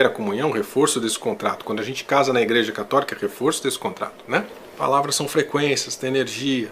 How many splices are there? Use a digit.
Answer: 1